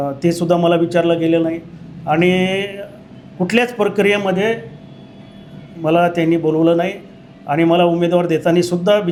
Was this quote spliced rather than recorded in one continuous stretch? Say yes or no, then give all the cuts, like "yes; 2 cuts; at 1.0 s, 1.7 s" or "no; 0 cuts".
no; 0 cuts